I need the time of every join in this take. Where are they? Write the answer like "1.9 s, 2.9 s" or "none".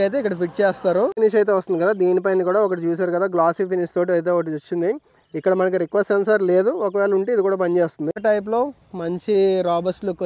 1.1 s, 8.1 s